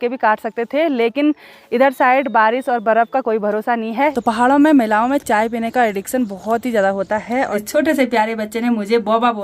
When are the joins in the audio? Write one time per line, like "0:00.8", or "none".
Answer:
0:04.1
0:07.6